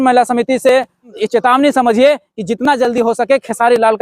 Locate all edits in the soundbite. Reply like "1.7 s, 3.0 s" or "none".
1.1 s